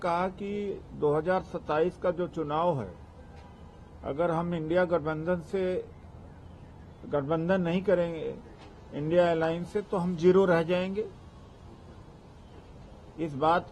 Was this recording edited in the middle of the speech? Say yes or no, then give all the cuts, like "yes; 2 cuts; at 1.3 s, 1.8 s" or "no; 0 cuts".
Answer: no; 0 cuts